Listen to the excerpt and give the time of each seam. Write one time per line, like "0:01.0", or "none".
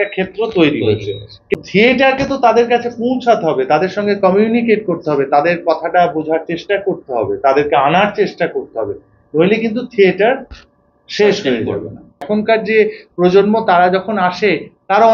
0:01.5
0:12.2